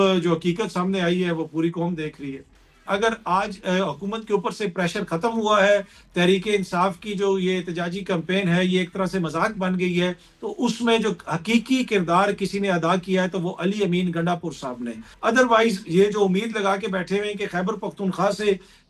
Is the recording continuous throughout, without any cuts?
no; 2 cuts; at 2.9 s, 15.1 s

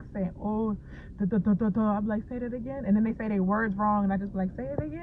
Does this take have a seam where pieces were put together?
no; 0 cuts

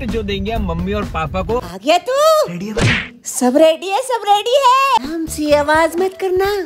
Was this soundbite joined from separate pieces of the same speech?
yes; 2 cuts; at 1.6 s, 5.0 s

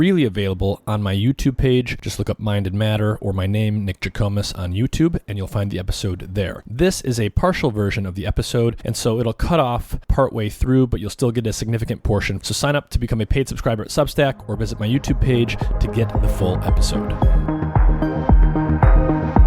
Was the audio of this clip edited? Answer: yes; 1 cut; at 16.6 s

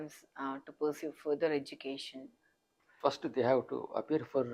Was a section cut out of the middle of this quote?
yes; 1 cut; at 2.9 s

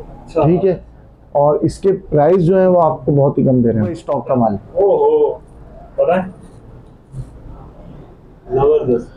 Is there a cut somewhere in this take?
yes; 1 cut; at 4.1 s

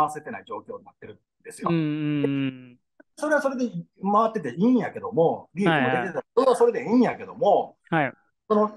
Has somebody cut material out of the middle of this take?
no; 0 cuts

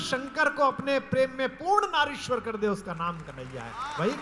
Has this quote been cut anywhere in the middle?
no; 0 cuts

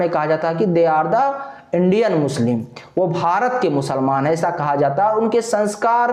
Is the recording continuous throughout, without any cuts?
yes; 0 cuts

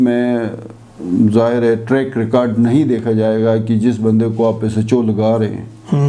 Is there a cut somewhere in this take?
no; 0 cuts

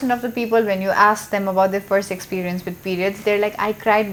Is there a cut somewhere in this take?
no; 0 cuts

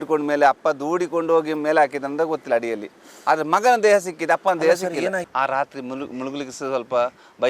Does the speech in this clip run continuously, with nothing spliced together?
no; 1 cut; at 5.3 s

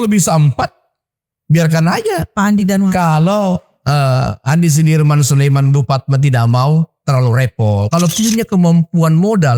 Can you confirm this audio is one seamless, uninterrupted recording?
no; 1 cut; at 7.8 s

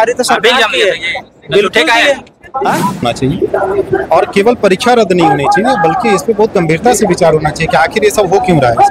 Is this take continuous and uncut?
no; 1 cut; at 3.0 s

